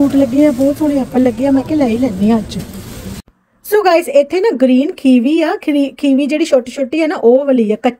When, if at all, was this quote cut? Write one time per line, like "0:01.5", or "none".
none